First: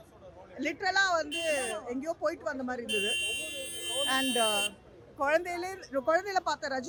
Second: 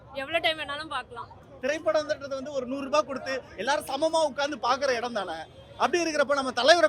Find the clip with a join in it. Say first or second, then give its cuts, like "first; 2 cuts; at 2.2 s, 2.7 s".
second; 1 cut; at 1.5 s